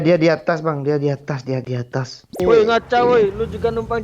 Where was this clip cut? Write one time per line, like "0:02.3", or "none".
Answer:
0:02.4